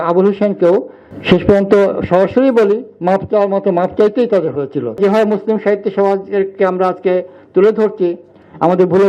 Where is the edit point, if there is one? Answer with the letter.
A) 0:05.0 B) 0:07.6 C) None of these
A